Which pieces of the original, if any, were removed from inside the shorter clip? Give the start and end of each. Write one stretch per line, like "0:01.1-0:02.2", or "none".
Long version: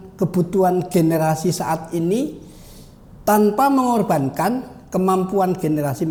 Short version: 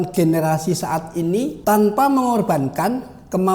0:02.3-0:03.2